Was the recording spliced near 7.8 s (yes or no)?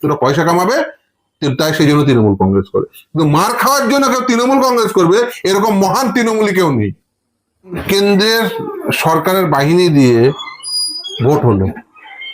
yes